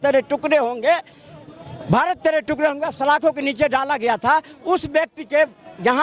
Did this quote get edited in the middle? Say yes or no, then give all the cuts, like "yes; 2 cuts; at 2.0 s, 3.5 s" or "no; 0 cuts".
no; 0 cuts